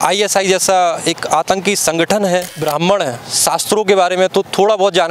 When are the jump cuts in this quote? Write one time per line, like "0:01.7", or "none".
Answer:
0:02.5